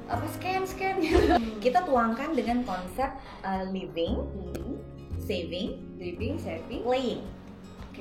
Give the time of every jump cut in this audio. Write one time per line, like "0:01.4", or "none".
0:01.4